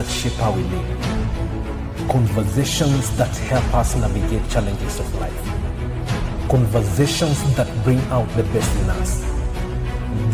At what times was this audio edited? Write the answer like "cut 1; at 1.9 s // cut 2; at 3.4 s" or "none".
none